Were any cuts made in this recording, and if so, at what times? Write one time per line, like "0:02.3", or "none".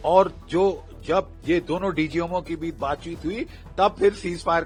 none